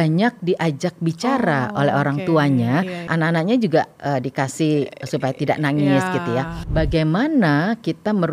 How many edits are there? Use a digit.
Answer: 2